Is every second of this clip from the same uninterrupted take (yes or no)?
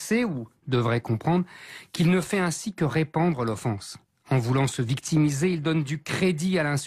no